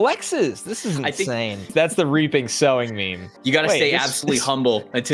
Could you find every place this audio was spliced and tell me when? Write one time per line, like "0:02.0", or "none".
0:01.7
0:03.3